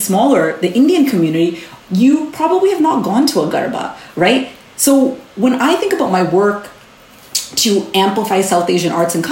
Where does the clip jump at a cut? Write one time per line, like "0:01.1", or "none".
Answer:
0:01.6

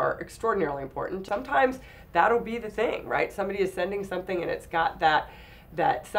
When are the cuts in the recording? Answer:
0:01.2

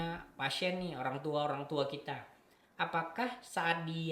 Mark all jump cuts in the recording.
none

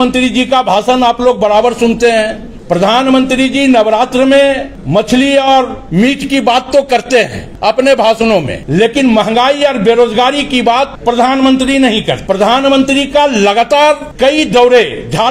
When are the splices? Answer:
0:02.5
0:04.7
0:05.8
0:07.4
0:08.6
0:10.9
0:12.2
0:14.1

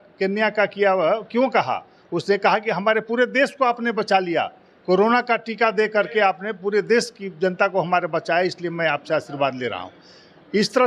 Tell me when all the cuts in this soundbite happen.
none

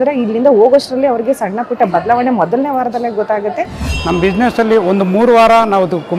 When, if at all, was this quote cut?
0:03.8

